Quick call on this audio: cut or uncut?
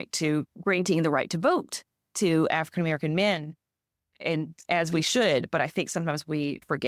uncut